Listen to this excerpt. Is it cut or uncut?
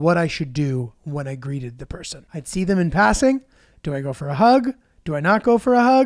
cut